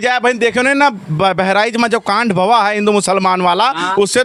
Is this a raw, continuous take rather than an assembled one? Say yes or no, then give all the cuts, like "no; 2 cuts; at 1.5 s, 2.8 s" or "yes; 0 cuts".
yes; 0 cuts